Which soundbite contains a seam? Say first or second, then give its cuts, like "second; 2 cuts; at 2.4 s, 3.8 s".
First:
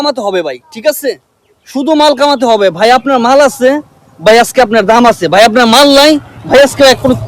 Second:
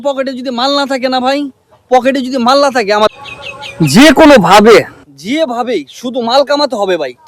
second; 1 cut; at 3.1 s